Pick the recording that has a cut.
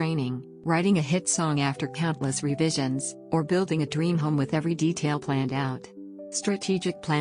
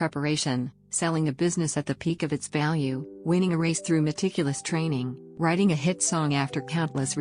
first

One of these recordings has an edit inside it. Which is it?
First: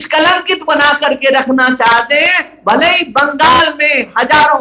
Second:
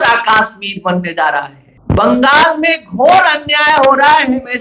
second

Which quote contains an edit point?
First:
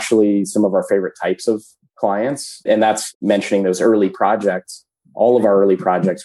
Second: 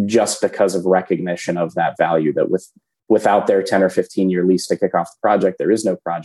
first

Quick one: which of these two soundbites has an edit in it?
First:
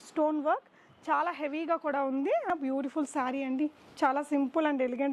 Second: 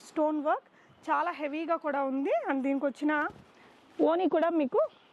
first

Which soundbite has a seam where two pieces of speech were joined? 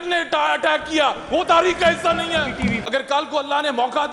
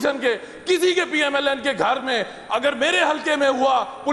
first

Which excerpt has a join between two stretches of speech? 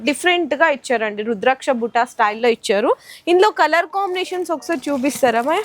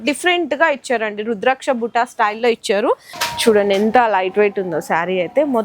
second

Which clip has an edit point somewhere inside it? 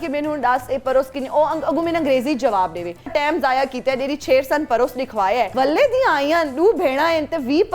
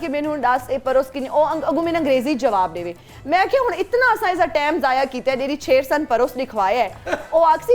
first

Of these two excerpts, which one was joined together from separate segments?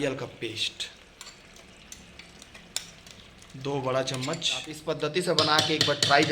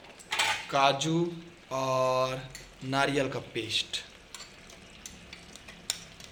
first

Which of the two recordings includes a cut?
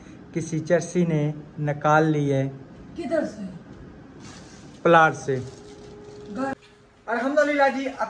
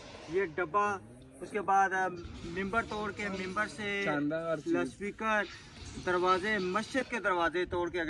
first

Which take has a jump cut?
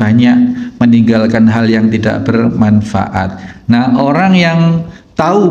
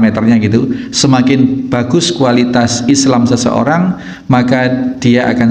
first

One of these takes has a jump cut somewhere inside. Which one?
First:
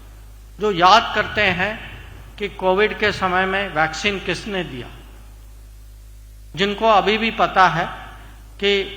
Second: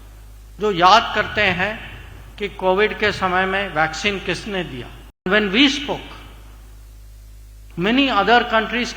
second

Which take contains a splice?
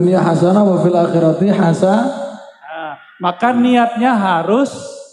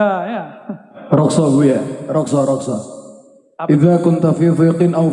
second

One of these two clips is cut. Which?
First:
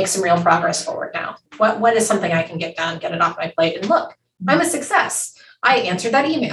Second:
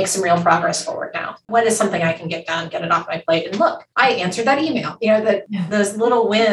second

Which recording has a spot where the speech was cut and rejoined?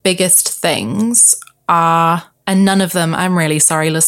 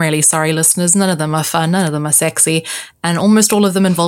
first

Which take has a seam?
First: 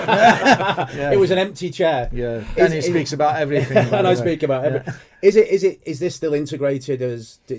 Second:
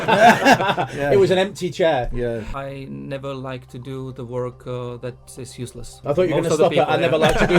second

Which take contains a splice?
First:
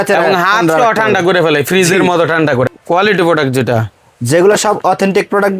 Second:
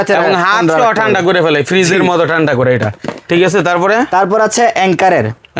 first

